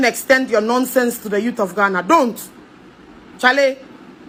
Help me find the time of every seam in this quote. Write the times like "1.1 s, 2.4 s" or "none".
none